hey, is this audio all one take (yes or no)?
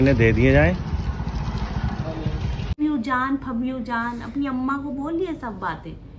no